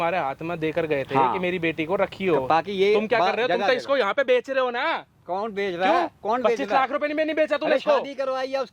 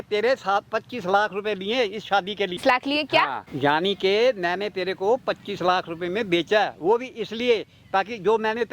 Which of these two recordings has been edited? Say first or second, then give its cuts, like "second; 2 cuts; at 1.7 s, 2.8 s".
second; 2 cuts; at 2.6 s, 3.4 s